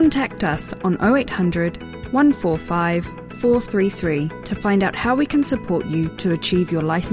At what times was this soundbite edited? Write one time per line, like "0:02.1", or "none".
none